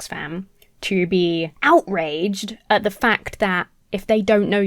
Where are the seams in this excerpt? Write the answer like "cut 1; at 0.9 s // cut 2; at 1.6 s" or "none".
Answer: cut 1; at 1.5 s